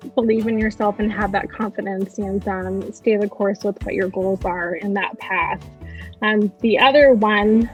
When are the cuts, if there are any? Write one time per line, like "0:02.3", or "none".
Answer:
none